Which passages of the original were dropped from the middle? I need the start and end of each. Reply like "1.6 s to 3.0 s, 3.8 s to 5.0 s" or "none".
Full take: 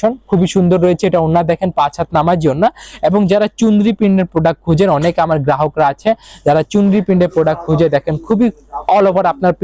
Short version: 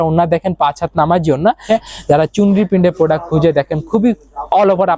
2.8 s to 6.0 s